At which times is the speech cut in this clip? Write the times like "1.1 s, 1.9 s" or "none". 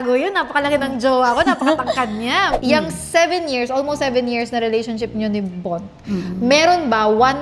2.5 s